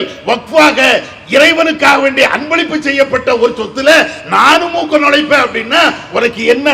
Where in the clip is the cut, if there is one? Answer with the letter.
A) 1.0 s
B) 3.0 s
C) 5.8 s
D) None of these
D